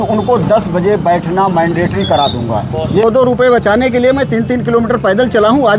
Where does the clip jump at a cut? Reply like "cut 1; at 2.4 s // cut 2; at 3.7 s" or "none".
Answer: cut 1; at 3.0 s

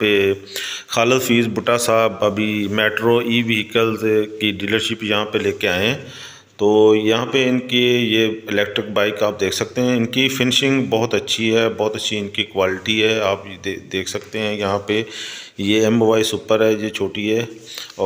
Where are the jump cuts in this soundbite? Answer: none

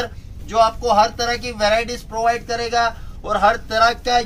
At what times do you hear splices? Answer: none

